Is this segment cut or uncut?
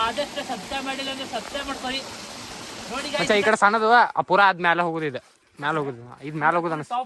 cut